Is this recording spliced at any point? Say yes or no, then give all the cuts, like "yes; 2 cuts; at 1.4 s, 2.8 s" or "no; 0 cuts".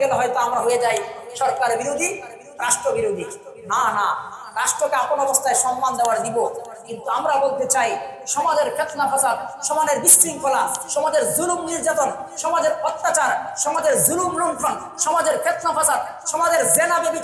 no; 0 cuts